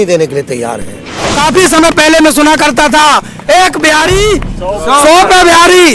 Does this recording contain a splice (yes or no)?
yes